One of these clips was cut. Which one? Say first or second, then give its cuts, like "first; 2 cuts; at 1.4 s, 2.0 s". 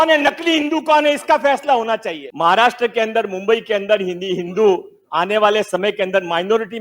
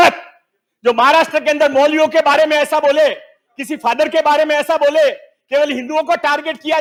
first; 1 cut; at 2.2 s